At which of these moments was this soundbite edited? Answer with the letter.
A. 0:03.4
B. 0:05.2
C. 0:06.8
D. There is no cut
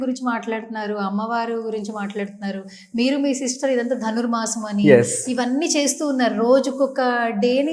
D